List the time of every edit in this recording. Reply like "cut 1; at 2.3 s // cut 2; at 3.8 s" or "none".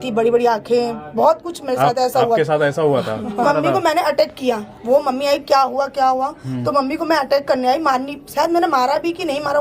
cut 1; at 3.4 s